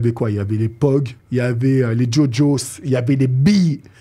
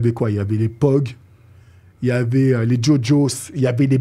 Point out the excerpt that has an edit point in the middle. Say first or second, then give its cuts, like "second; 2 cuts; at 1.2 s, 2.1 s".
first; 1 cut; at 1.2 s